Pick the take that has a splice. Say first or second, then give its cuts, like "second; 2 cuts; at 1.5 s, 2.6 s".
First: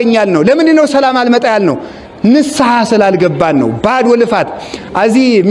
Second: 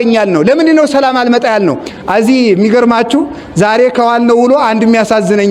second; 1 cut; at 1.9 s